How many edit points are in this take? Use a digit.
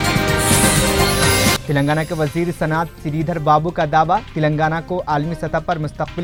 0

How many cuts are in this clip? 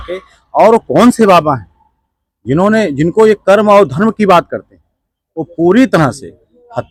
0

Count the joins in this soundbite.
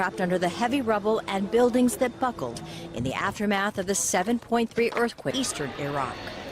1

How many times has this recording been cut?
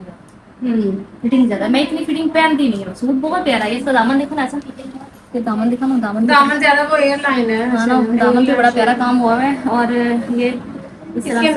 0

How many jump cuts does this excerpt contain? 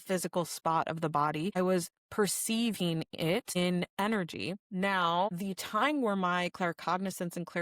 4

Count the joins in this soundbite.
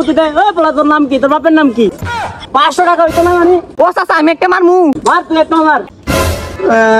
2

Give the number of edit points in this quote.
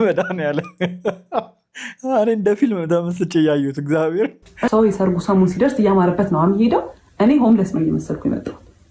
1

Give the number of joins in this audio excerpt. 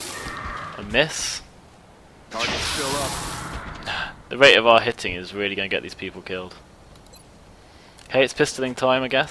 0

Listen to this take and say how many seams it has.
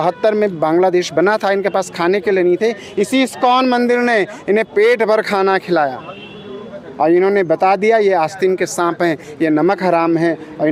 0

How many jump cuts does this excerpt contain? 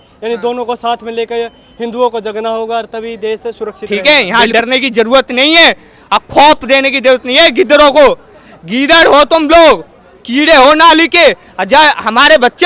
1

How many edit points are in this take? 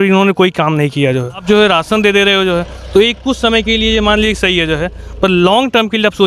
1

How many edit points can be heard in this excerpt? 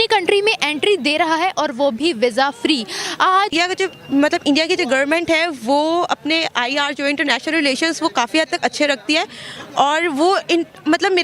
1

